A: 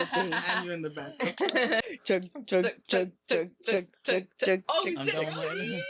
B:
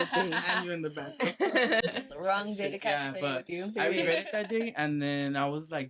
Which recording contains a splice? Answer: A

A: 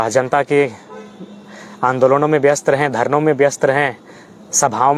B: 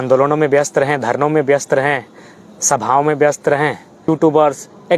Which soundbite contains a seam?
B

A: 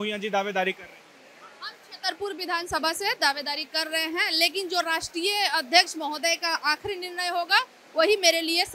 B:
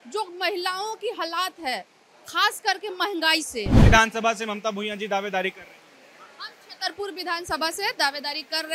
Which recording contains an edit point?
B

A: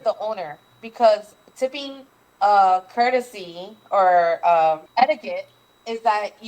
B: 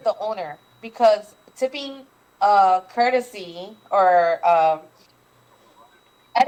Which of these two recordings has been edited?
A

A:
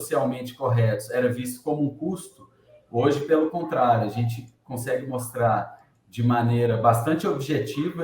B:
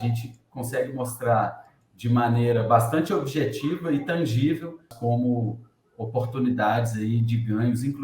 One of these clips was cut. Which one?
B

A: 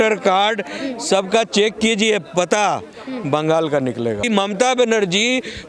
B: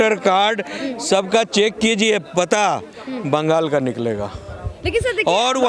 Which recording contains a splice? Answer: A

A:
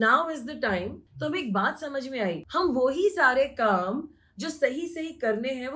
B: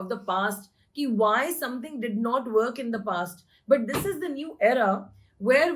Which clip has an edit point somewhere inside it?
A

